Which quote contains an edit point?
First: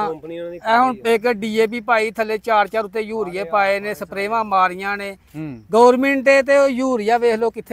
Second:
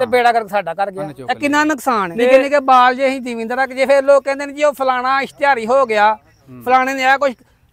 second; 2 cuts; at 1.1 s, 2.1 s

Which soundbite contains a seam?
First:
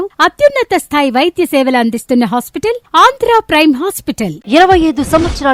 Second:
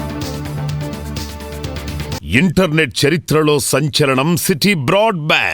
second; 1 cut; at 2.1 s

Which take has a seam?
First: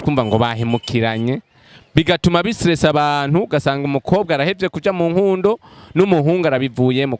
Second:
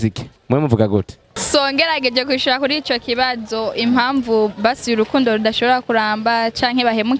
second; 1 cut; at 1.2 s

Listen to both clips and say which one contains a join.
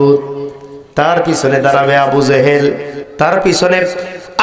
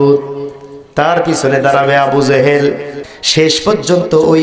second; 1 cut; at 3.0 s

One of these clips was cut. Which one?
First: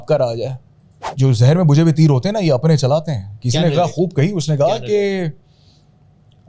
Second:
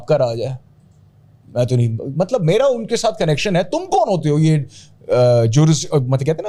first; 1 cut; at 1.0 s

